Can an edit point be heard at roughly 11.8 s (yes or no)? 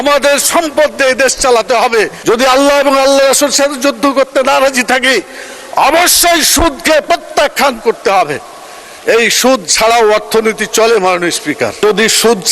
yes